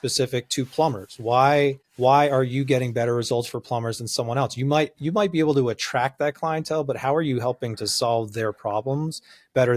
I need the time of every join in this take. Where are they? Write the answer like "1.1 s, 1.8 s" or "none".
1.9 s